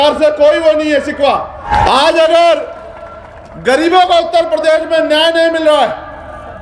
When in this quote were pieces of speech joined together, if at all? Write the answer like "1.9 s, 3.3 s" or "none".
1.7 s